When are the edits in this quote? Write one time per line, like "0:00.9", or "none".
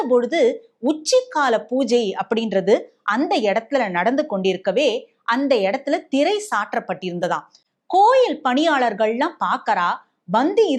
none